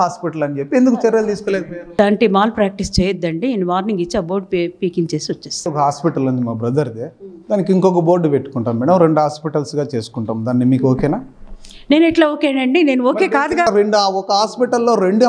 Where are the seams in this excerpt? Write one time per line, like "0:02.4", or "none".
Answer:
0:01.9
0:05.7
0:13.7